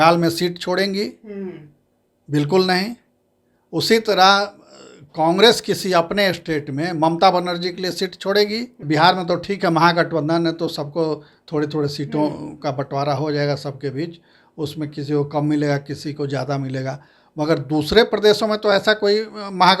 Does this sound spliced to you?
yes; 1 cut; at 8.8 s

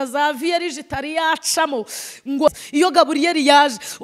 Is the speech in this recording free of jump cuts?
no; 1 cut; at 2.5 s

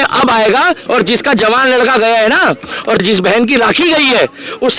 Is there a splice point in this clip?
yes; 2 cuts; at 0.8 s, 3.0 s

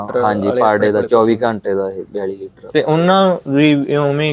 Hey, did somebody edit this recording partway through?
no; 0 cuts

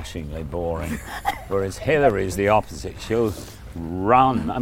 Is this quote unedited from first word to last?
yes; 0 cuts

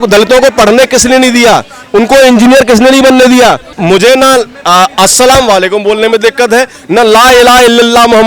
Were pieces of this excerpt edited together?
yes; 1 cut; at 3.8 s

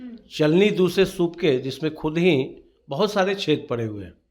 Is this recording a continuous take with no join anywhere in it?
yes; 0 cuts

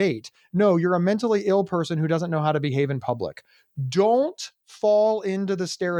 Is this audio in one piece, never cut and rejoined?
yes; 0 cuts

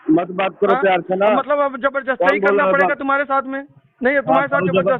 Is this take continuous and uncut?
yes; 0 cuts

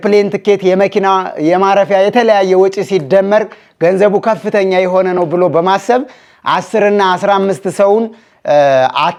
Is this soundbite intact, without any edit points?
yes; 0 cuts

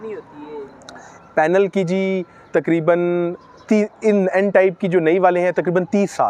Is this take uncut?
yes; 0 cuts

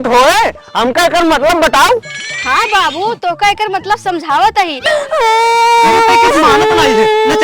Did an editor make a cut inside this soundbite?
yes; 1 cut; at 5.0 s

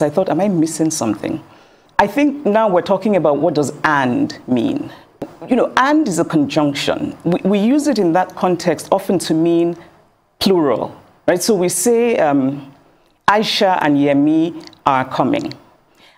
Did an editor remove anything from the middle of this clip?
yes; 2 cuts; at 1.7 s, 5.3 s

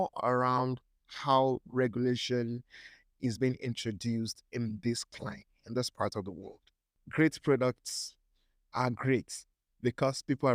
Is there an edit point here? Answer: yes; 1 cut; at 7.0 s

